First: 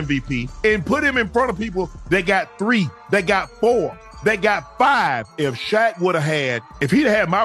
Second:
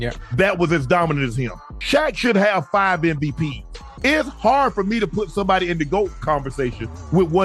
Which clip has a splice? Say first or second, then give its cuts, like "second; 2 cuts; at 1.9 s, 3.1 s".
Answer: second; 1 cut; at 3.9 s